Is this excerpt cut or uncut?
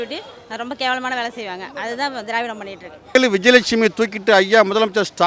cut